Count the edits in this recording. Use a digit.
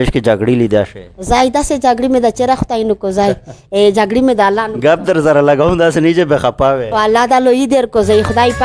0